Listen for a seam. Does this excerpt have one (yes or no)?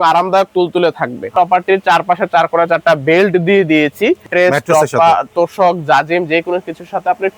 yes